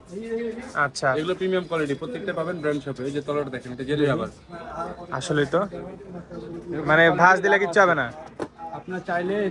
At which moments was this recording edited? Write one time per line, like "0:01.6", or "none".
none